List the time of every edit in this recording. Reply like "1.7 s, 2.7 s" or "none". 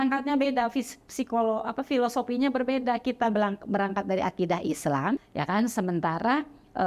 5.2 s